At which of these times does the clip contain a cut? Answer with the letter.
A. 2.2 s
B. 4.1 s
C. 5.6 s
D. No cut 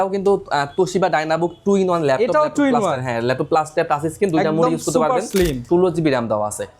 C